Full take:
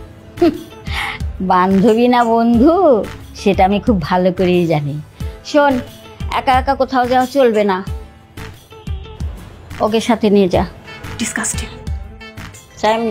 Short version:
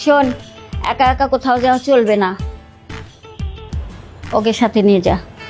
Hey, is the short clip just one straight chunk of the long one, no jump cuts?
yes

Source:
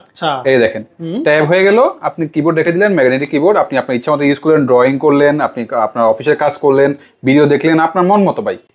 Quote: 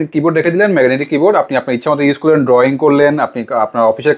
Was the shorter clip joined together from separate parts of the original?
no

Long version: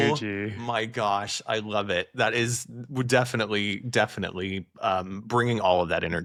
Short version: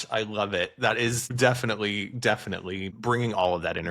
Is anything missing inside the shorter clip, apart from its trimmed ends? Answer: yes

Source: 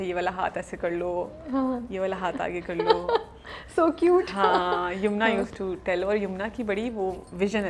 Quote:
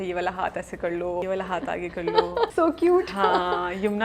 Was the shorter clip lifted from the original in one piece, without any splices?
no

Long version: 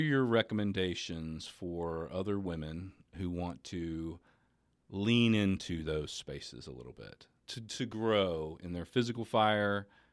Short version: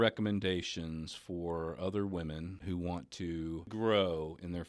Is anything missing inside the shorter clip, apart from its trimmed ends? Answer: yes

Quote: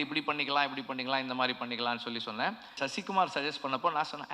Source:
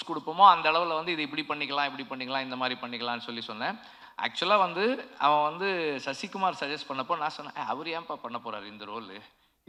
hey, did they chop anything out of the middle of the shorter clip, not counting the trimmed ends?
yes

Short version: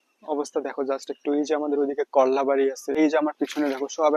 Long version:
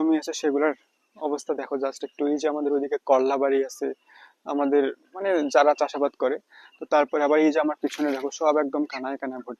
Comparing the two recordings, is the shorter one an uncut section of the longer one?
no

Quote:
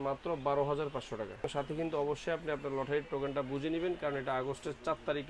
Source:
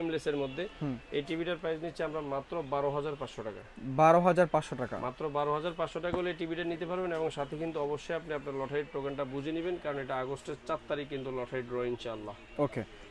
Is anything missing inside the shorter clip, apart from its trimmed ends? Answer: yes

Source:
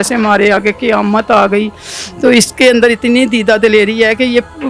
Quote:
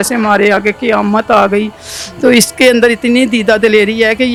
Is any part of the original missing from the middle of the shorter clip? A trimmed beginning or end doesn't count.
no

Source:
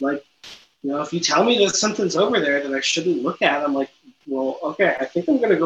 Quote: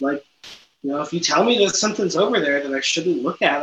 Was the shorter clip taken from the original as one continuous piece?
yes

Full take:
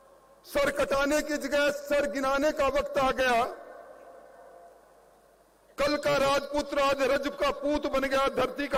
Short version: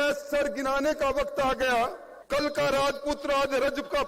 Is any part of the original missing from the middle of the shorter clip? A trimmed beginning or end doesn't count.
yes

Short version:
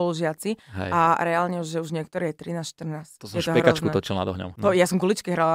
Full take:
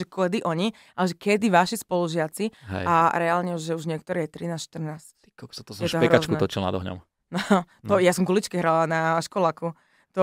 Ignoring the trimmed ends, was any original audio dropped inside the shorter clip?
yes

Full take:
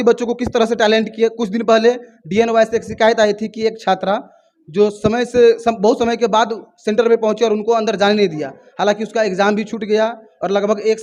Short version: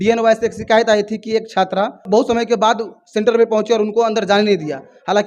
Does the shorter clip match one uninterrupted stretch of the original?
no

